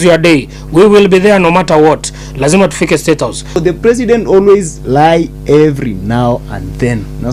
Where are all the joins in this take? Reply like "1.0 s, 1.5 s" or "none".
3.6 s